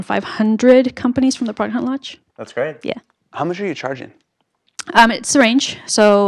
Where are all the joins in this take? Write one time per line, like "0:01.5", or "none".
0:01.2